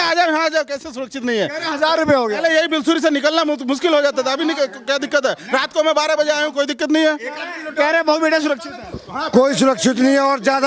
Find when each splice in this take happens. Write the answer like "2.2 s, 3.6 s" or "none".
none